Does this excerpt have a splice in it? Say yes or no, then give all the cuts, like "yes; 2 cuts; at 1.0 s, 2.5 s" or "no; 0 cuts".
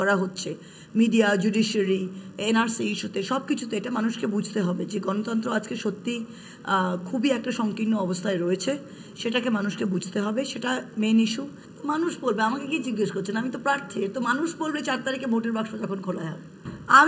no; 0 cuts